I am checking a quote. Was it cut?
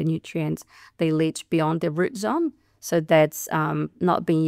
no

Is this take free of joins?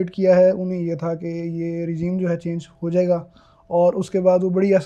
yes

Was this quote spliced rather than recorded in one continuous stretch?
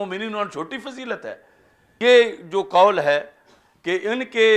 yes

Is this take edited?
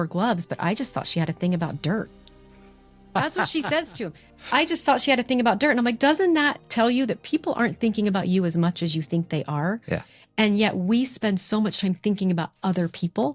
no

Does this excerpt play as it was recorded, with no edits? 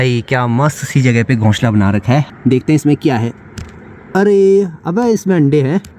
no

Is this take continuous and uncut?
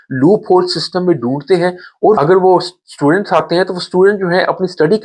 no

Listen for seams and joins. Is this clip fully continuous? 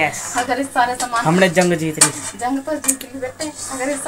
yes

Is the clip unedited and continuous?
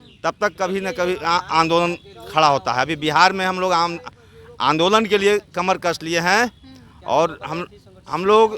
yes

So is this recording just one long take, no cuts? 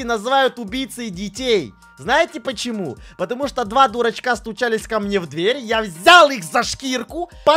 yes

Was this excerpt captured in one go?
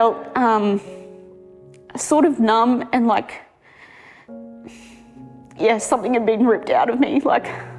yes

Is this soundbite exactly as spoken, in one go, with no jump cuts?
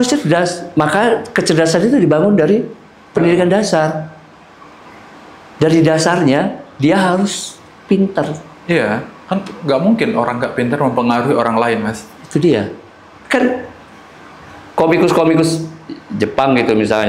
yes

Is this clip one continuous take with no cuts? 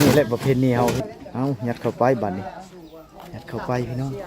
no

